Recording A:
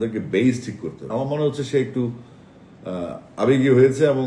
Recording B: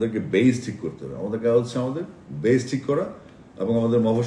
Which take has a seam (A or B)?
A